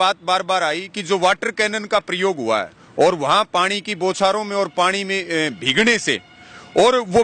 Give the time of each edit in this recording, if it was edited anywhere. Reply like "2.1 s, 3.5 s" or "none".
2.8 s